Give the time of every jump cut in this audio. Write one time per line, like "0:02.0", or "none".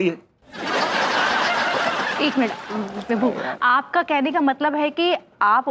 none